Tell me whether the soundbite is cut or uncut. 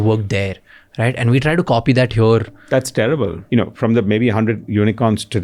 cut